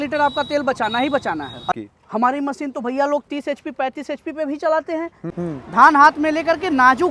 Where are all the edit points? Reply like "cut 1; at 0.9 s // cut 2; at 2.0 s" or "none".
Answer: cut 1; at 1.8 s // cut 2; at 5.3 s

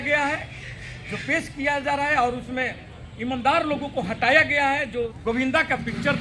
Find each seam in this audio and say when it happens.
cut 1; at 5.1 s

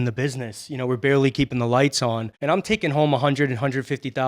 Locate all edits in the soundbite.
cut 1; at 2.3 s

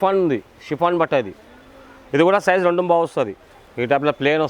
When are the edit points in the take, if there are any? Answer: none

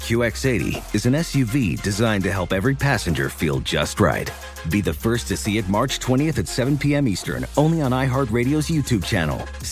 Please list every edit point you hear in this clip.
none

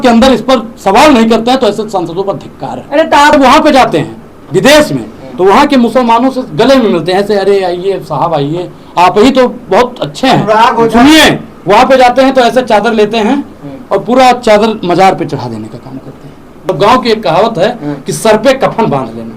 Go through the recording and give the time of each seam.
cut 1; at 3.3 s // cut 2; at 16.7 s

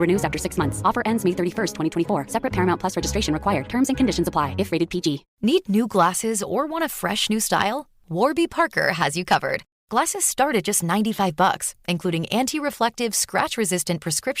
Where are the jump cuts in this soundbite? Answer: cut 1; at 5.3 s

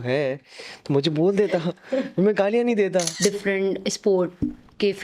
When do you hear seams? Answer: cut 1; at 3.1 s

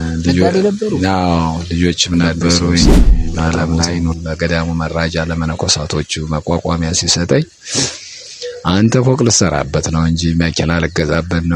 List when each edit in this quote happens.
cut 1; at 4.1 s

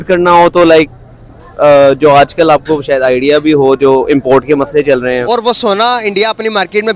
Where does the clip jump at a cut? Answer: cut 1; at 5.2 s

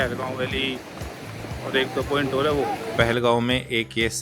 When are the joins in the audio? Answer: cut 1; at 2.9 s

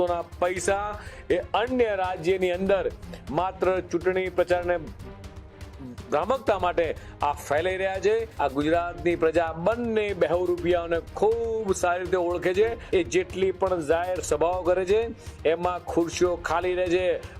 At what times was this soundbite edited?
cut 1; at 8.3 s // cut 2; at 12.8 s

